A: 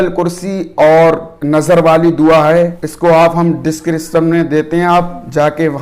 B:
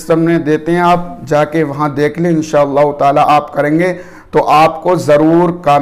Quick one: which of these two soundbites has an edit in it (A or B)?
A